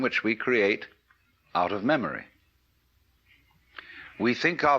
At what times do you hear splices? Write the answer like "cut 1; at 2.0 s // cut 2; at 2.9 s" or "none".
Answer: cut 1; at 3.3 s